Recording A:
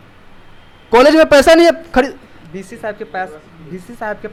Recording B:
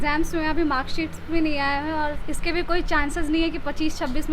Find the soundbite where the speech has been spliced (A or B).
B